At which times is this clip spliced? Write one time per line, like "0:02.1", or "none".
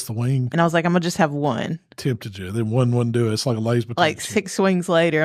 none

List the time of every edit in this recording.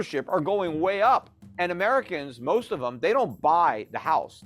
0:01.4

